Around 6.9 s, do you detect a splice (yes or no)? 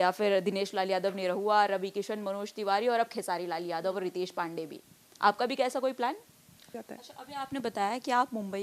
yes